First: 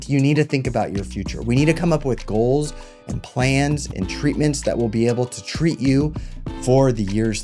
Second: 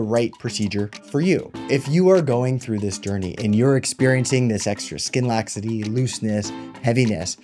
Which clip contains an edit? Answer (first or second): second